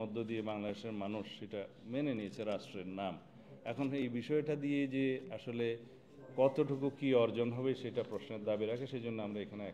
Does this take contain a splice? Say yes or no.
no